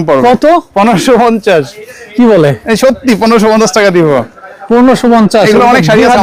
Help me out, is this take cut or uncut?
uncut